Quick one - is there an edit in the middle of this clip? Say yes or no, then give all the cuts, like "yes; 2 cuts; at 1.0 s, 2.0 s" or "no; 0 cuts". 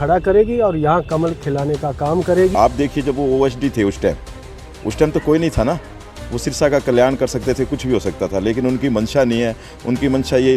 yes; 1 cut; at 2.5 s